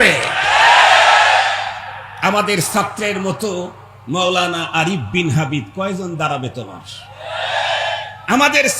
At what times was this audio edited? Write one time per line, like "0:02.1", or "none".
none